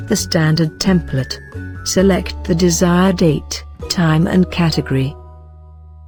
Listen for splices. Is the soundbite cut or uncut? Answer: uncut